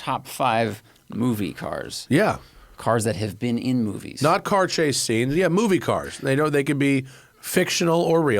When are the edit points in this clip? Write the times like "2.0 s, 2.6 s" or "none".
2.5 s